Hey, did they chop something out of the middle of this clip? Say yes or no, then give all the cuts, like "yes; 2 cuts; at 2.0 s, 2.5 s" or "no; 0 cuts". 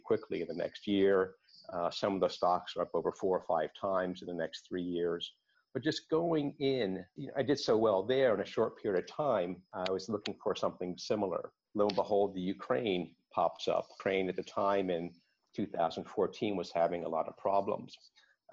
yes; 1 cut; at 11.6 s